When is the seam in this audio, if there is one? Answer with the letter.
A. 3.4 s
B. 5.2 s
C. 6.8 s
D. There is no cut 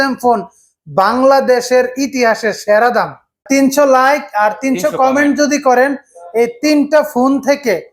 A